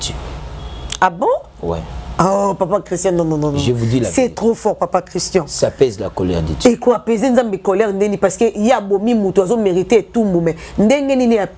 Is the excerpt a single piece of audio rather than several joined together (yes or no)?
yes